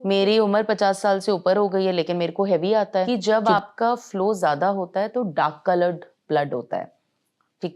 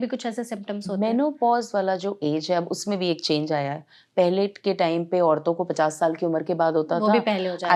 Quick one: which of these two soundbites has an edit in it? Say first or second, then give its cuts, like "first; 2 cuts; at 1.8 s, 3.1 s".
first; 1 cut; at 3.1 s